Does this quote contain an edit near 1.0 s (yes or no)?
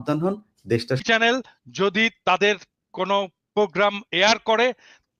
yes